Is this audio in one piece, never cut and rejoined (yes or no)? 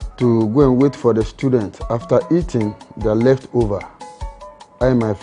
yes